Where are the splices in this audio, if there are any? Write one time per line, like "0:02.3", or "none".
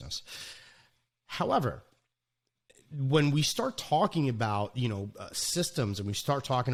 none